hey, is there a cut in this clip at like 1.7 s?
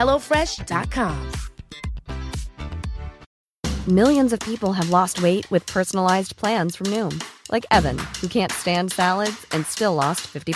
no; 1 cut; at 3.2 s

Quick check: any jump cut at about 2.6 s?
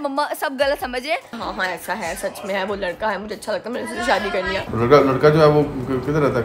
no; 2 cuts; at 1.3 s, 4.6 s

